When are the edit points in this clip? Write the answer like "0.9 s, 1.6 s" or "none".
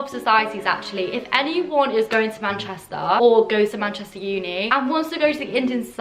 3.2 s, 4.6 s